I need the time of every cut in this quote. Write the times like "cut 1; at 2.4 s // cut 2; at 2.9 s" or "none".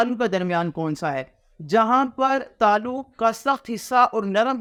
none